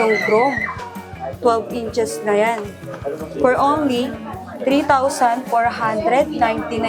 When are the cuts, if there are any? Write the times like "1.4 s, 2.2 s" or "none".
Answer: none